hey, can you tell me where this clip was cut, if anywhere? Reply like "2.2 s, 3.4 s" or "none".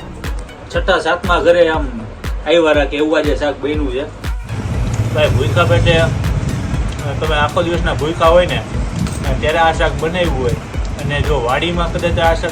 4.2 s